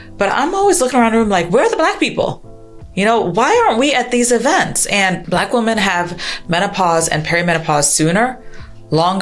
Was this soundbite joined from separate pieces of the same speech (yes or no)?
yes